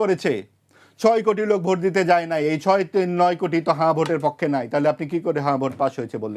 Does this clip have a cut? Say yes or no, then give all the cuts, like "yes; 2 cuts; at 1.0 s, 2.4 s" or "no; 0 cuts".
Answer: no; 0 cuts